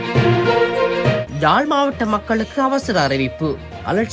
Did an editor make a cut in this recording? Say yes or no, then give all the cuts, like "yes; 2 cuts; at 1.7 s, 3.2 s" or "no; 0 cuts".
yes; 1 cut; at 1.3 s